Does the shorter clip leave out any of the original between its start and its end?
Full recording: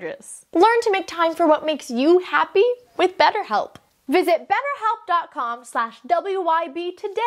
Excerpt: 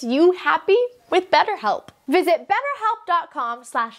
yes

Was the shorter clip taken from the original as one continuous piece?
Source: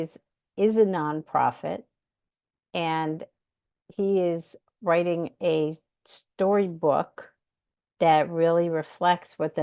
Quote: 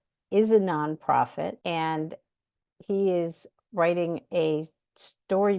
no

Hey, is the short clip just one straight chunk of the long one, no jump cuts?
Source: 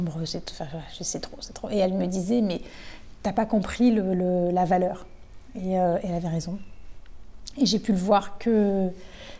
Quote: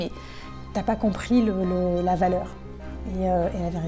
yes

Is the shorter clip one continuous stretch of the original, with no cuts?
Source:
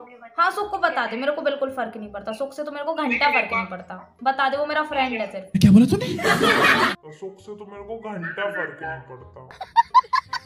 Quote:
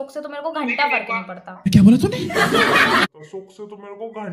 no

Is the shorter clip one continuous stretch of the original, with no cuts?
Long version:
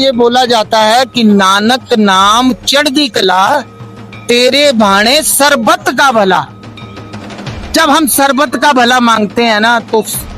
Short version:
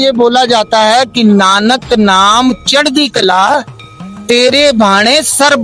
yes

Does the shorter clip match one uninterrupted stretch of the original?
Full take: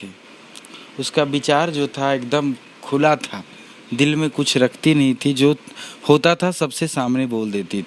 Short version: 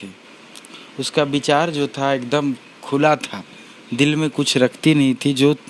yes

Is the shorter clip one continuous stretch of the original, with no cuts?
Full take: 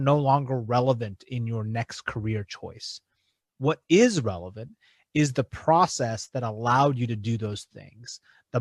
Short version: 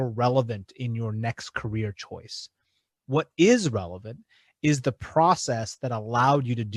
yes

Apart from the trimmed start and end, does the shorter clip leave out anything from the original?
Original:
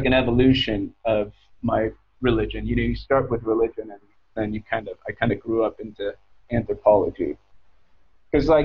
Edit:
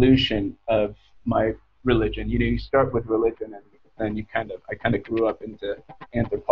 no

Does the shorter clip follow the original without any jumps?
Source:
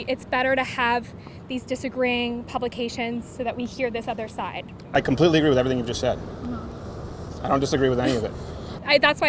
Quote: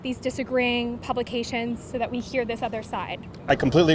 yes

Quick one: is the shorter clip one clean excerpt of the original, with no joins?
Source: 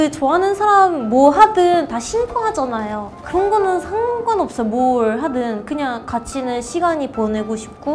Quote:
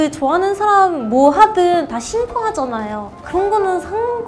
yes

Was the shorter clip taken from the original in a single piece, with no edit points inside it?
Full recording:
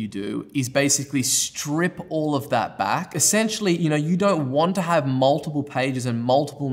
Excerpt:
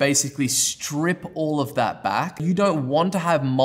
no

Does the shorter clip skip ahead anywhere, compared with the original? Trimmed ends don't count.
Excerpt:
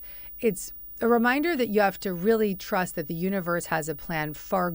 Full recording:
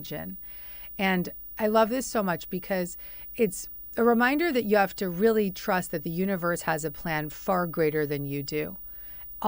no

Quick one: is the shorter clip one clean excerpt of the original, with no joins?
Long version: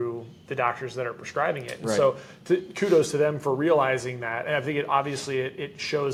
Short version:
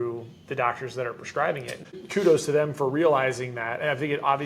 no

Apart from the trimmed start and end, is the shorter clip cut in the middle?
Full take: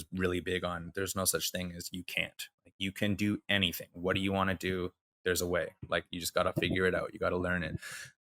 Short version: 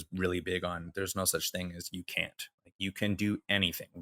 no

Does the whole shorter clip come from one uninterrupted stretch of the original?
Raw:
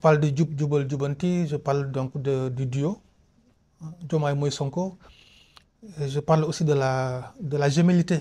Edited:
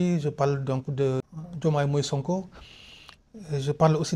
no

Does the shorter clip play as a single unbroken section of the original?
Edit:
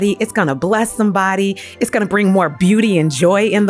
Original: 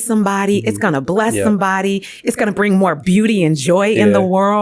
yes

